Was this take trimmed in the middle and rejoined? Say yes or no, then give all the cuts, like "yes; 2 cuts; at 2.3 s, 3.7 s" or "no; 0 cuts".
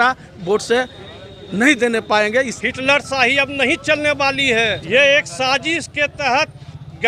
yes; 2 cuts; at 2.5 s, 4.8 s